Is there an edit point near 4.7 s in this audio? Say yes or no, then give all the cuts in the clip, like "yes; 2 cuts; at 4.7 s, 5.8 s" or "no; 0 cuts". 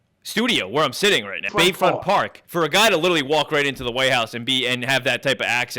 no; 2 cuts; at 1.5 s, 2.4 s